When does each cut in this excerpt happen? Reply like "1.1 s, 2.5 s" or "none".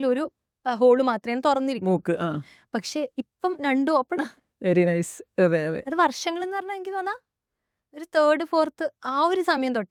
none